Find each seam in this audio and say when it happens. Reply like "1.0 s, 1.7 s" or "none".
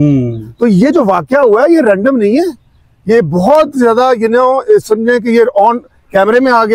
none